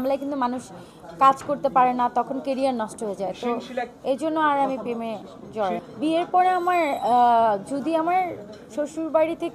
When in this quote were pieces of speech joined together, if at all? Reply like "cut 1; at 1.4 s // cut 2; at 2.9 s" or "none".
none

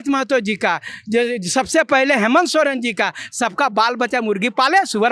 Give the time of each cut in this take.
none

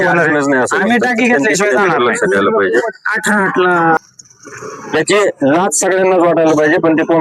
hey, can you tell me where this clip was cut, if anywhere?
cut 1; at 4.0 s

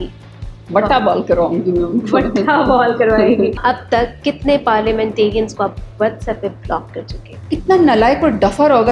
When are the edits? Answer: cut 1; at 3.6 s // cut 2; at 7.5 s

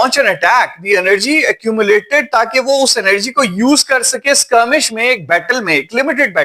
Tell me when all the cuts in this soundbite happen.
none

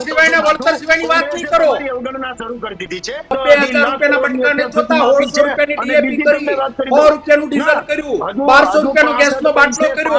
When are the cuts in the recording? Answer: cut 1; at 3.3 s

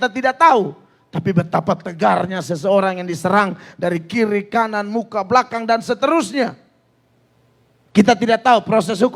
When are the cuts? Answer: none

